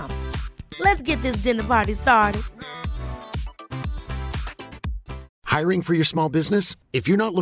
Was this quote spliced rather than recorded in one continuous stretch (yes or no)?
yes